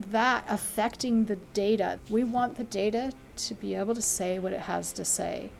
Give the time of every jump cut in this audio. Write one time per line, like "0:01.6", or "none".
0:02.0

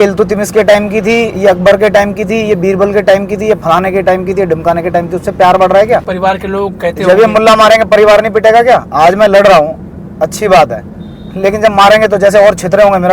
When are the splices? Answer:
0:06.1

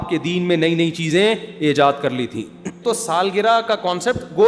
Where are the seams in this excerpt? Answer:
0:02.8

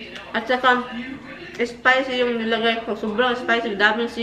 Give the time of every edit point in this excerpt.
none

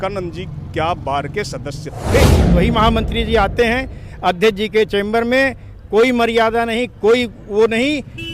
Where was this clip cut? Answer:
0:02.5

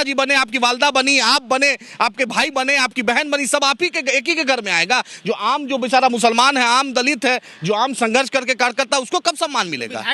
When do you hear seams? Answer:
none

